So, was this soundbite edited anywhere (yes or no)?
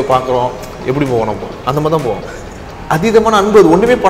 yes